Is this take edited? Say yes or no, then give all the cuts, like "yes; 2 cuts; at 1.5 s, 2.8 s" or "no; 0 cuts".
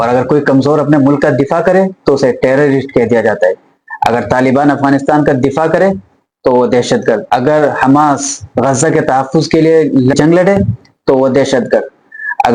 no; 0 cuts